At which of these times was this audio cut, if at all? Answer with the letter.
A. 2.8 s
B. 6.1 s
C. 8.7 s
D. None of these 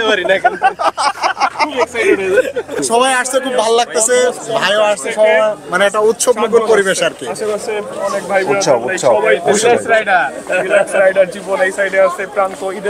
A